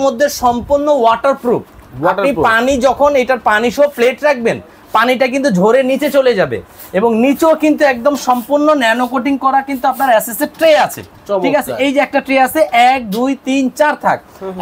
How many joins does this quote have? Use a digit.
0